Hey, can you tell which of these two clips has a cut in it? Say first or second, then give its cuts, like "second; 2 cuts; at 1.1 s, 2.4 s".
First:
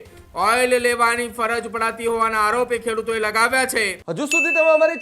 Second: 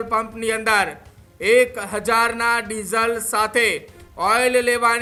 first; 1 cut; at 4.0 s